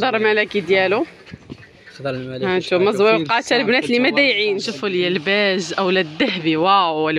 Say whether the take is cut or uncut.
cut